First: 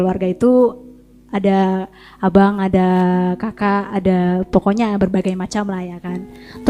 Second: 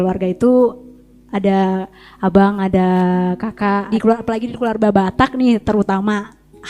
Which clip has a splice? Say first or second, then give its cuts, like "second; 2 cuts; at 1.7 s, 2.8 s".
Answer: second; 1 cut; at 3.9 s